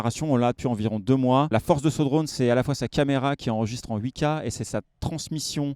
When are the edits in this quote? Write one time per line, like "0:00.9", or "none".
0:01.5